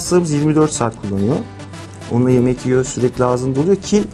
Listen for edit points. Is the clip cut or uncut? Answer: uncut